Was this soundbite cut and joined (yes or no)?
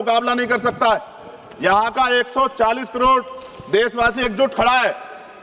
no